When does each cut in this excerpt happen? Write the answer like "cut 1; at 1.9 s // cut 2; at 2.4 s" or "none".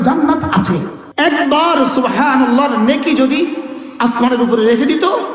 cut 1; at 1.0 s